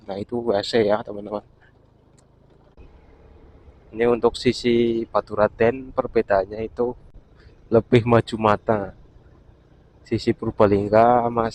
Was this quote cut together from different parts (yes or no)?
yes